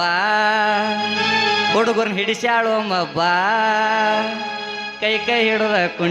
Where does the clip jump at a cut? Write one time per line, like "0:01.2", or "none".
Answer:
none